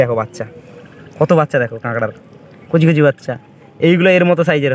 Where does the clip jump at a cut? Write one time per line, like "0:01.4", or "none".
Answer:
none